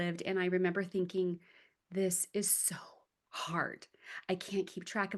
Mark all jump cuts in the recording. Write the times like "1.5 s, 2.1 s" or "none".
none

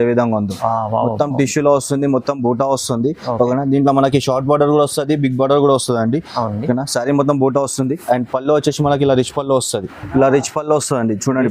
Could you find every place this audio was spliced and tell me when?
10.0 s

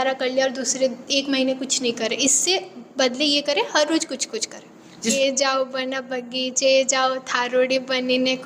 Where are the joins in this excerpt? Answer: 5.1 s

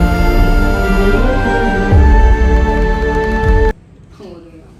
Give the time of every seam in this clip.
none

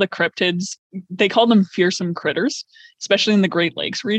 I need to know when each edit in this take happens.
none

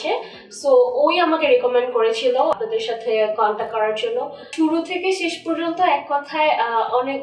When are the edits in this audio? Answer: 2.5 s, 4.5 s

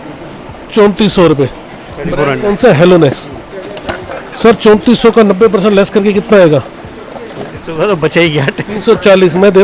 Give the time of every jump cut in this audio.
none

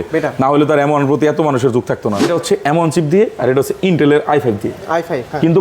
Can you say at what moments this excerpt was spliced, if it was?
2.3 s

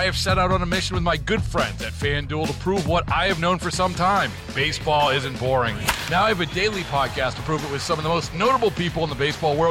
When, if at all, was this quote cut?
none

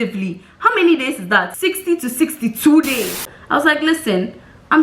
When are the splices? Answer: 1.5 s, 3.3 s

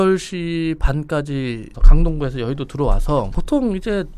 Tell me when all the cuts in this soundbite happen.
1.8 s, 3.4 s

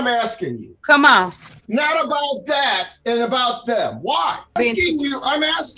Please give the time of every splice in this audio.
1.6 s, 4.5 s

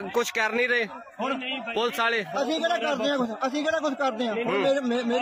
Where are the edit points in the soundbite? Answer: none

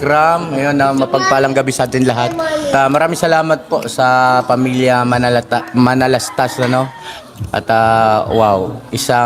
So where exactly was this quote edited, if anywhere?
2.7 s, 6.3 s

